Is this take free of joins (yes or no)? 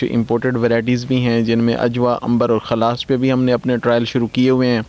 yes